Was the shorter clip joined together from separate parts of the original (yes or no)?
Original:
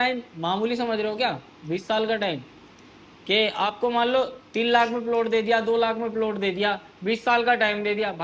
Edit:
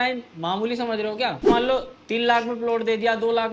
yes